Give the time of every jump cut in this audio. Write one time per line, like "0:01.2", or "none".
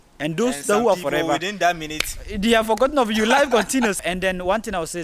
0:04.0